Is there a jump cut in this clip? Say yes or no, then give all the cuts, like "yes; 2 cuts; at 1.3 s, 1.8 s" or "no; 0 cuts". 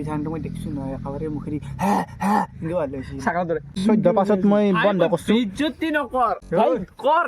yes; 2 cuts; at 3.8 s, 6.4 s